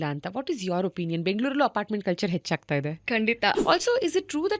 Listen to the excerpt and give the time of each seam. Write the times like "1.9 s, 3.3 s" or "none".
3.6 s

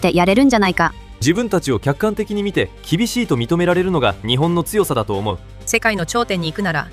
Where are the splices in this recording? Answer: 1.1 s, 5.5 s

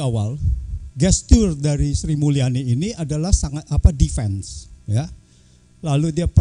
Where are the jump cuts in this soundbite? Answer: none

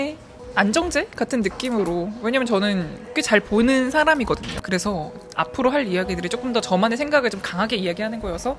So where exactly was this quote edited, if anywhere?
4.6 s

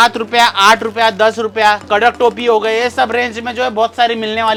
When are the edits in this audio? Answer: none

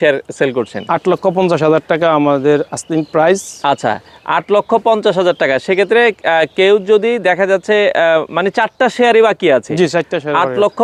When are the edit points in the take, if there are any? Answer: none

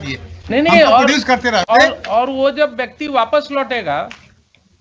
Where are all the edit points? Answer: none

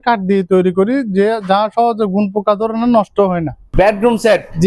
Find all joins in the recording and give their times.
3.6 s

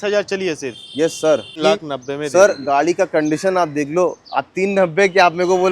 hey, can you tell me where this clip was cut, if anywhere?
1.6 s

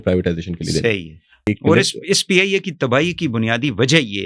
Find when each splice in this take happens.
1.5 s

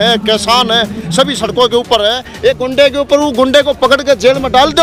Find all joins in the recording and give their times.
none

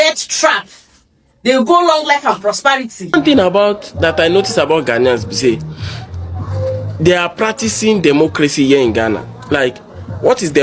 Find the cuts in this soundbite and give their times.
3.1 s

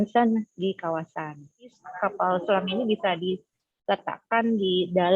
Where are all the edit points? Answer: 1.9 s

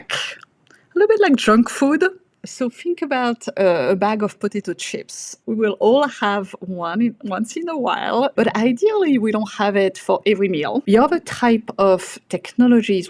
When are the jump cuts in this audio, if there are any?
2.5 s, 5.3 s, 8.3 s, 10.8 s

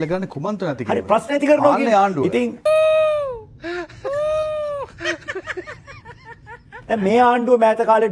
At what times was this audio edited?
6.7 s

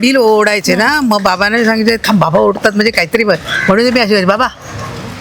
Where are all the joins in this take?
none

